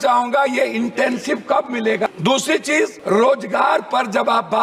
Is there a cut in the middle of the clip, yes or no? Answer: yes